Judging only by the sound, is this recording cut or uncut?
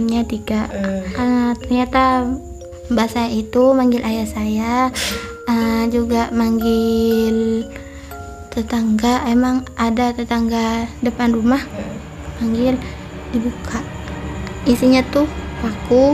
cut